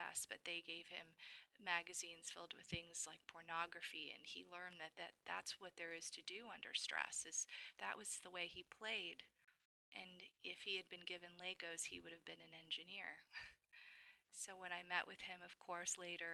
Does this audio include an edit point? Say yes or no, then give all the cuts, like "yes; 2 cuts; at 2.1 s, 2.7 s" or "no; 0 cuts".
no; 0 cuts